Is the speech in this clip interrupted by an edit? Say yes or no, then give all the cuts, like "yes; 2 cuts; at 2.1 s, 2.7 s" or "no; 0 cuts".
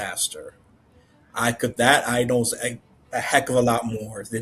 no; 0 cuts